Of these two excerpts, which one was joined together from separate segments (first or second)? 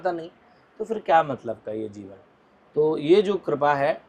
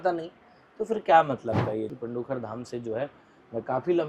second